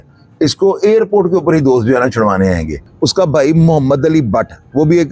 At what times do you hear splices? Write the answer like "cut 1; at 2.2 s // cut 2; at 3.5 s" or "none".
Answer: cut 1; at 2.9 s